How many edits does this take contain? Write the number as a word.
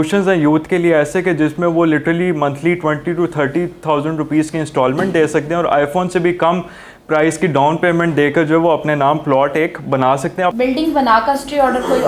one